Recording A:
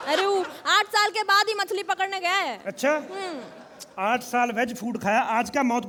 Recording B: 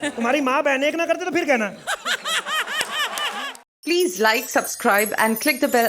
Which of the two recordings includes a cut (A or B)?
B